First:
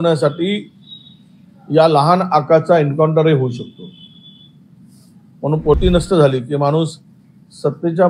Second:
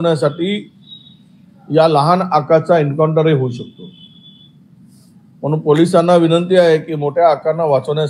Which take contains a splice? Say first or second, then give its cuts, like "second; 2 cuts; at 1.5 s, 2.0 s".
first; 1 cut; at 5.8 s